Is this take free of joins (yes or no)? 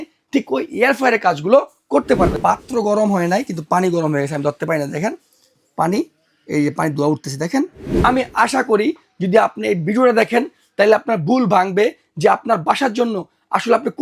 no